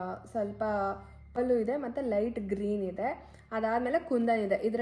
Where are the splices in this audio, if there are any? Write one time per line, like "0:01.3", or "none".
0:01.4